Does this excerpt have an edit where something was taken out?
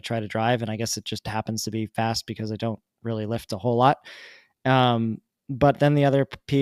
no; 0 cuts

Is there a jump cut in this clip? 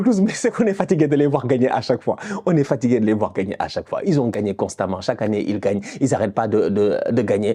no; 0 cuts

